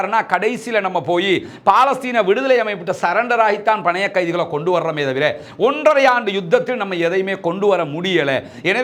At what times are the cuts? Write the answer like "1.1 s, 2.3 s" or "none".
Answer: none

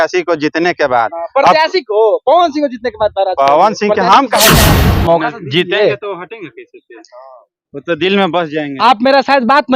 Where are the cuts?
4.7 s

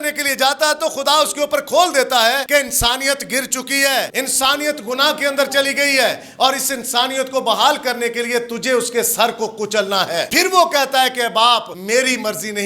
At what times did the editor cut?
2.4 s, 4.1 s, 10.3 s, 11.7 s

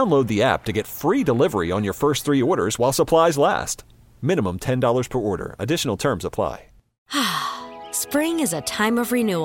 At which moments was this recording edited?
7.1 s

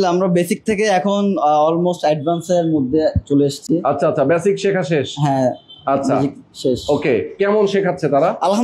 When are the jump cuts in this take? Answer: none

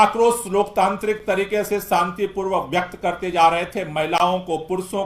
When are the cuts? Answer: none

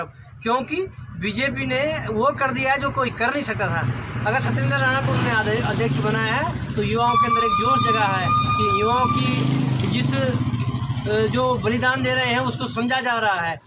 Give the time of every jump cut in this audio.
none

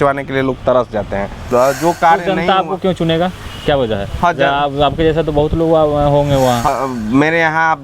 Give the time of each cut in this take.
1.5 s, 6.7 s

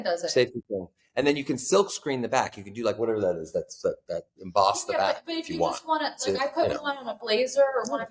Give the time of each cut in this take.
none

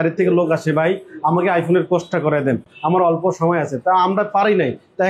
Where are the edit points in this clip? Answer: none

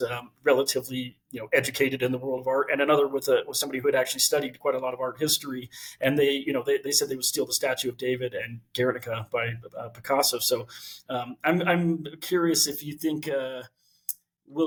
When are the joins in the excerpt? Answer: none

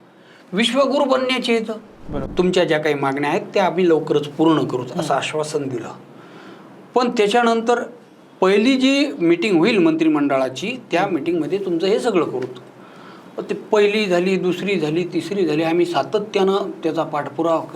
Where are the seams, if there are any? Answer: 2.2 s

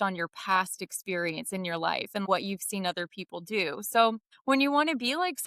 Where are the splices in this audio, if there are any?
2.2 s, 4.3 s

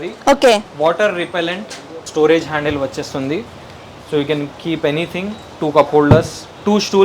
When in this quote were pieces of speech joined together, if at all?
2.0 s

